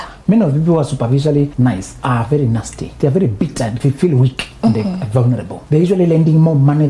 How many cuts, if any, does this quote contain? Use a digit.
4